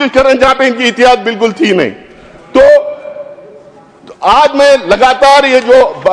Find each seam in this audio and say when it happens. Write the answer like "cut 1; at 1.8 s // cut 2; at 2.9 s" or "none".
none